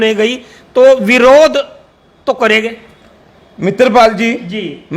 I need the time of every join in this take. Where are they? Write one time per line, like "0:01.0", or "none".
none